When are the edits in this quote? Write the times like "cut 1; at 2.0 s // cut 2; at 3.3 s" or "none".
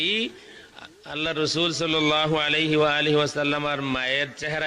none